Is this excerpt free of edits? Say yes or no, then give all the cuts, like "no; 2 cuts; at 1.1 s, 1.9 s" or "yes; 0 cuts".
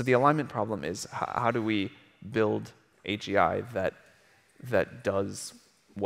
yes; 0 cuts